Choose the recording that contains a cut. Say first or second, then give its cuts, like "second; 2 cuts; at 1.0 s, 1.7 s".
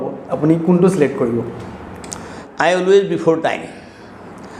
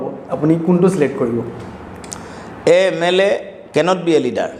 first; 1 cut; at 2.4 s